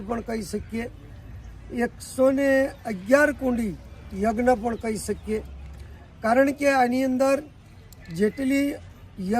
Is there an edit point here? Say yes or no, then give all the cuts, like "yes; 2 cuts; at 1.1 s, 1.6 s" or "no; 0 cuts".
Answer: no; 0 cuts